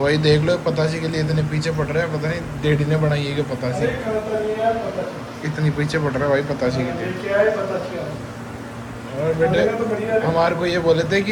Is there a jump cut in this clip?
no; 0 cuts

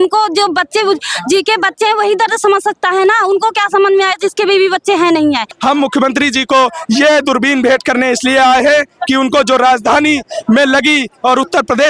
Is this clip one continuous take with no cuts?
no; 1 cut; at 5.5 s

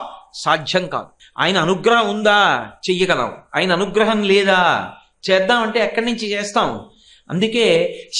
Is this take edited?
yes; 1 cut; at 1.2 s

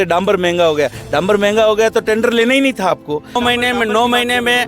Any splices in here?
yes; 1 cut; at 3.4 s

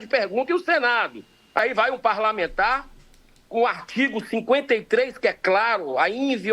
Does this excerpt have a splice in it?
yes; 1 cut; at 1.6 s

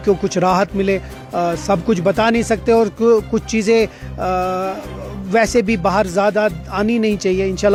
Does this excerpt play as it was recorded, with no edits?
yes; 0 cuts

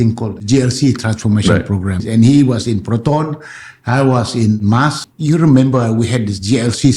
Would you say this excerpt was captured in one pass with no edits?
no; 2 cuts; at 2.0 s, 4.8 s

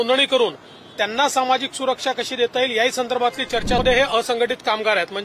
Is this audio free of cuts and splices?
no; 1 cut; at 3.8 s

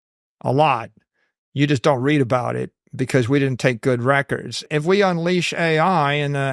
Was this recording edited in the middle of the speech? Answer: yes; 1 cut; at 4.7 s

